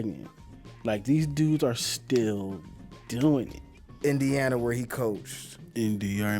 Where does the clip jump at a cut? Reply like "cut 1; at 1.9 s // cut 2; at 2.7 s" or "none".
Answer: cut 1; at 3.6 s